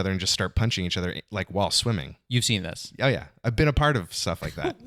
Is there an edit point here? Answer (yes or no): no